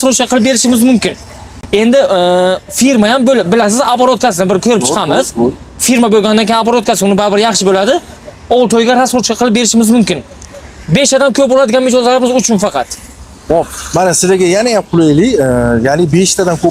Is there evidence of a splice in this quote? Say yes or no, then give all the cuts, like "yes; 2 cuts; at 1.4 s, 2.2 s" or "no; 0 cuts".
no; 0 cuts